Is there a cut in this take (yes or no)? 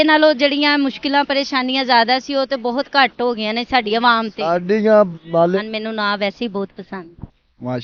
yes